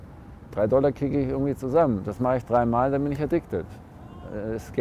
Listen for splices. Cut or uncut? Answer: uncut